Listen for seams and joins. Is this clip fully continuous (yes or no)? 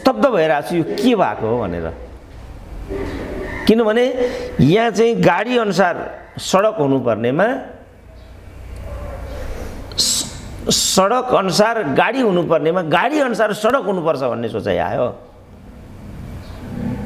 yes